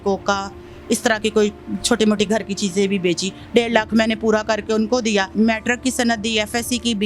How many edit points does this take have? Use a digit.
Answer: 1